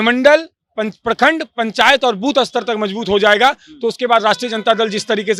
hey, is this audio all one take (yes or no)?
yes